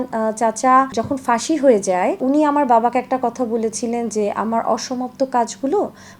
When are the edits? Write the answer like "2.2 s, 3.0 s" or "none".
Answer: 0.9 s, 2.2 s